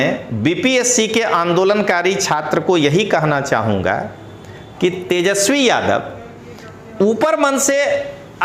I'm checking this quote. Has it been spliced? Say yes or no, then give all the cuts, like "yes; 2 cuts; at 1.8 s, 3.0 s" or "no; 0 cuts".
no; 0 cuts